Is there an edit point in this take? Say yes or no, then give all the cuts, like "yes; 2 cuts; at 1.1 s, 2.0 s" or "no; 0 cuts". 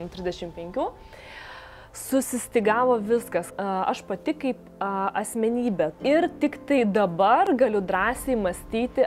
yes; 2 cuts; at 3.5 s, 6.0 s